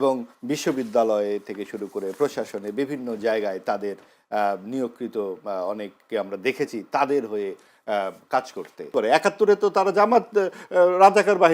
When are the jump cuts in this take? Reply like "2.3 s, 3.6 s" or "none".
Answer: 8.9 s